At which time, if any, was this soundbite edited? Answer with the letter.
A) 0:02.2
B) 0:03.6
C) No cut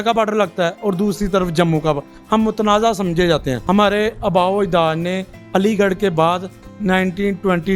B